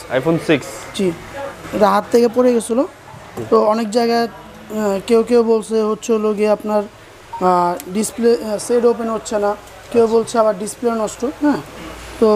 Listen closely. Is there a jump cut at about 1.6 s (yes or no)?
yes